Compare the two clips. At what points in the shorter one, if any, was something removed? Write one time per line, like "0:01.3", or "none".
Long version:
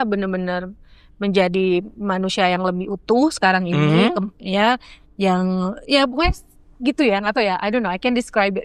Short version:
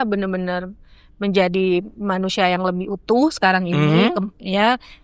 none